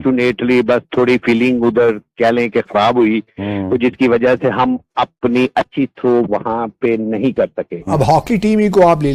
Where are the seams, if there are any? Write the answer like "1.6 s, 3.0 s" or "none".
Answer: 7.9 s